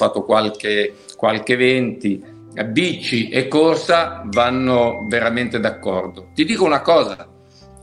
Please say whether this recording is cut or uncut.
cut